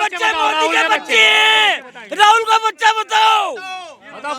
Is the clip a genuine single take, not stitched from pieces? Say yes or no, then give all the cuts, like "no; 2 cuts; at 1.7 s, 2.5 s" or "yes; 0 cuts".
yes; 0 cuts